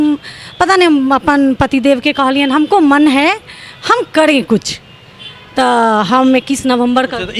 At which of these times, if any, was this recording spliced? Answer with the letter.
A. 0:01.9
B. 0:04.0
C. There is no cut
C